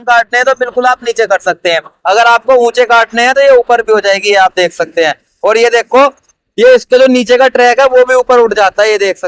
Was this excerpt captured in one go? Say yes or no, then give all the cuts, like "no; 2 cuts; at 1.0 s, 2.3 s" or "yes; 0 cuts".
yes; 0 cuts